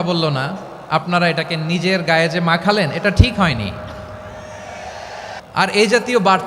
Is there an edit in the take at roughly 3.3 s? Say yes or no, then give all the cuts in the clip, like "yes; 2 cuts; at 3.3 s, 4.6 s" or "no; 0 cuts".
no; 1 cut; at 5.4 s